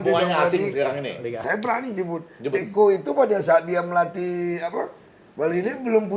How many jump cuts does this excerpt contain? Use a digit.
1